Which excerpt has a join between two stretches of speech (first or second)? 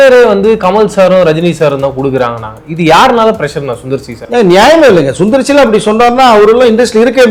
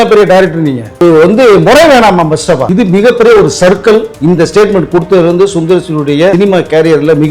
second